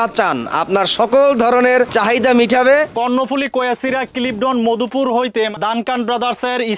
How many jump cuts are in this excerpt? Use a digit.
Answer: 3